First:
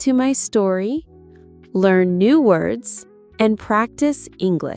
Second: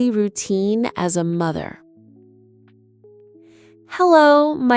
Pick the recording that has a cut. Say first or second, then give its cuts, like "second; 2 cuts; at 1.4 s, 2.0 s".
second; 2 cuts; at 1.8 s, 3.9 s